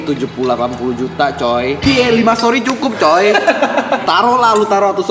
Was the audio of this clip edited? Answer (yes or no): yes